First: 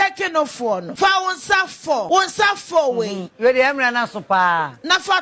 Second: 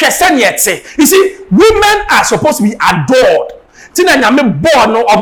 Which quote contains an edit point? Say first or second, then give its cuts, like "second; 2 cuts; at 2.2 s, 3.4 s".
first; 2 cuts; at 0.9 s, 2.1 s